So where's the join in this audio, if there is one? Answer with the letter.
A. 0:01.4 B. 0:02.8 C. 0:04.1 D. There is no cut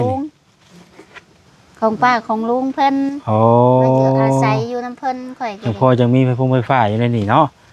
D